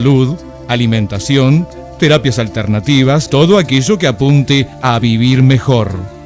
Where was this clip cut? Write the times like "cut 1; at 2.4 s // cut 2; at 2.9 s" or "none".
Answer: cut 1; at 3.3 s